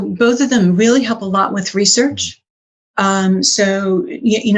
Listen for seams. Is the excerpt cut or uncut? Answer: uncut